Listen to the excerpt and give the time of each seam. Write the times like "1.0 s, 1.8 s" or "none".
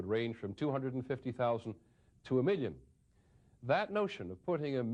1.7 s